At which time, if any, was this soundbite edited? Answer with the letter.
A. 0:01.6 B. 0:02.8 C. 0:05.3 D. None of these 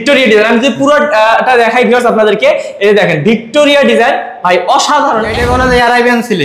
C